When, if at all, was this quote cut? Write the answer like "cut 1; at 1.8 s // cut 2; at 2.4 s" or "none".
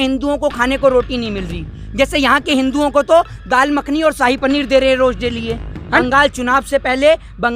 cut 1; at 6.0 s